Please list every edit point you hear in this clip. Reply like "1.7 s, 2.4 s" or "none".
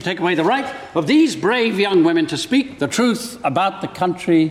none